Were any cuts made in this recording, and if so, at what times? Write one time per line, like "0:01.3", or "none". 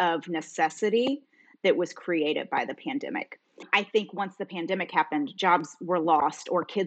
0:03.6
0:05.3